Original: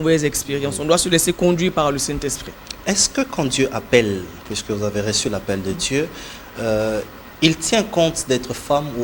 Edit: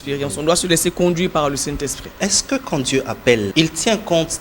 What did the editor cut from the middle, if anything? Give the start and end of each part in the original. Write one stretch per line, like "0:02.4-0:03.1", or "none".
0:02.4-0:02.7
0:04.2-0:07.4